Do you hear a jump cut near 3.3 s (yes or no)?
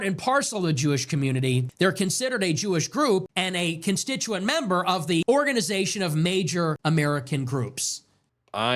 yes